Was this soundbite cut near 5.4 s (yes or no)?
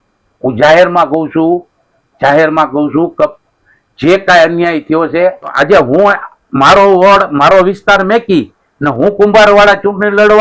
yes